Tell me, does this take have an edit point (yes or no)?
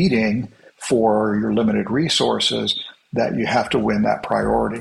no